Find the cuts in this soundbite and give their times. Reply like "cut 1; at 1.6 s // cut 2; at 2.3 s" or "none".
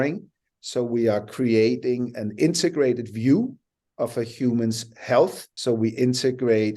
cut 1; at 5.5 s